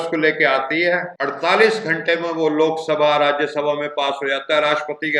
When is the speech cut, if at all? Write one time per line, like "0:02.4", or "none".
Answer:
0:01.2